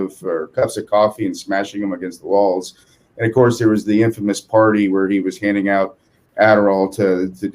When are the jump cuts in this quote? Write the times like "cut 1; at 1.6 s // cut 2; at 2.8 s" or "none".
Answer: none